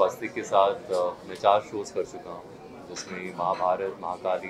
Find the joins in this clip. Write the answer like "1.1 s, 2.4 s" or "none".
none